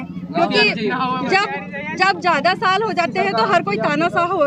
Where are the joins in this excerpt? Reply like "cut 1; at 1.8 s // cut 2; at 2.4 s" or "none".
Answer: none